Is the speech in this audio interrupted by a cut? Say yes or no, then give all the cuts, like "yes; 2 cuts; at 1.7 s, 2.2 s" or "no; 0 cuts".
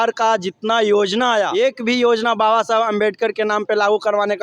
yes; 1 cut; at 1.5 s